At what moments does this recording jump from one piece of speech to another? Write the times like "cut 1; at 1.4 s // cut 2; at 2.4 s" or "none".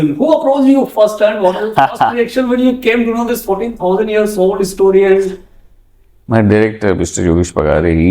none